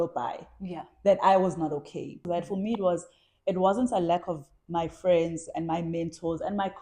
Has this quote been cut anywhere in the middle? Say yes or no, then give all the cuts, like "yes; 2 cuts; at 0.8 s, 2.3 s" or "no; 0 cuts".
yes; 1 cut; at 2.2 s